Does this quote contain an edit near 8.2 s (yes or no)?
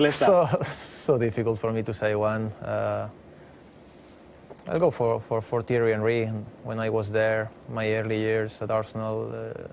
yes